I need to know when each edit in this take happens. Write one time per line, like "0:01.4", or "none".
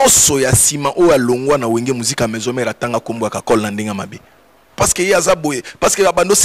0:04.8